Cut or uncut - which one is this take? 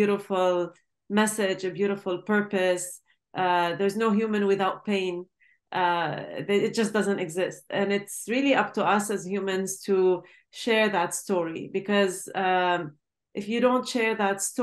uncut